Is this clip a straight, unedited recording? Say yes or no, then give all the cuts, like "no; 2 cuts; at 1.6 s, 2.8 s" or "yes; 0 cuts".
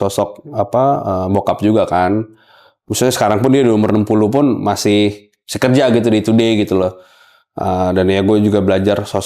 yes; 0 cuts